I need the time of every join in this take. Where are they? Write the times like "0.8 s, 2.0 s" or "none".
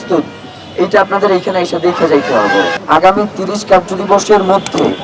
2.8 s